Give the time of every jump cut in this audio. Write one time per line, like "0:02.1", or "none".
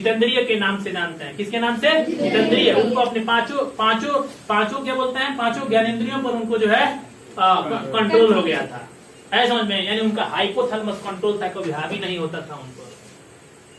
none